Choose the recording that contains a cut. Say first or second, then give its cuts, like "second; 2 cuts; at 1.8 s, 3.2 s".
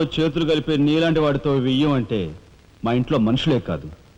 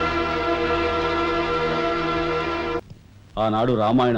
second; 1 cut; at 2.9 s